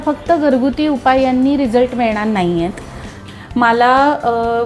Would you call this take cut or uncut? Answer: cut